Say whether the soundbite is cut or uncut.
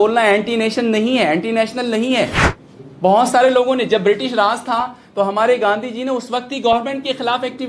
uncut